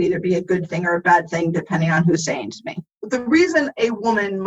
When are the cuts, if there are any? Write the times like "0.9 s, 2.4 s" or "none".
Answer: 3.0 s